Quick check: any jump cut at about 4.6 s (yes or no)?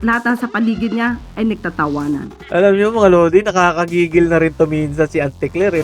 no